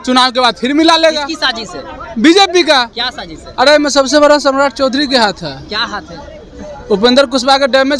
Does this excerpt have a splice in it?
no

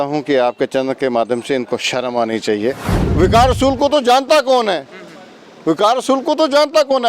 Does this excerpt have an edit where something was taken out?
yes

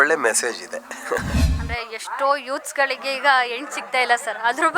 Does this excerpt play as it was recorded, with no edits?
no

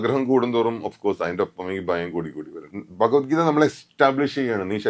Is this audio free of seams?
no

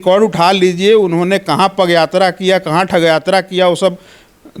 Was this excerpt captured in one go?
yes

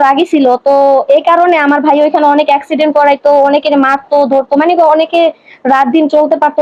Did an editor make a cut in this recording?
no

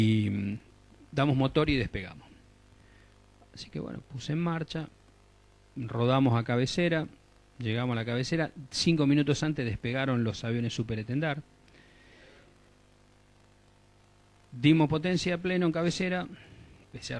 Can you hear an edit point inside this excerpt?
no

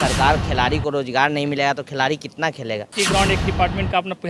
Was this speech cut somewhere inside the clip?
yes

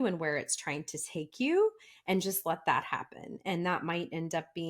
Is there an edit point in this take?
no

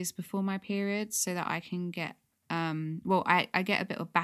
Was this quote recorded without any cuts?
yes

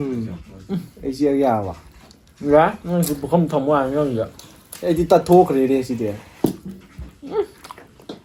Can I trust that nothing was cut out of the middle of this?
yes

